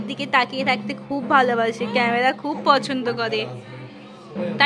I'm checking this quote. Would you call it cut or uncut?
uncut